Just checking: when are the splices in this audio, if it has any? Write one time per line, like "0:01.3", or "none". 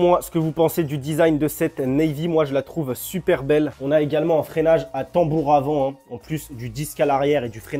none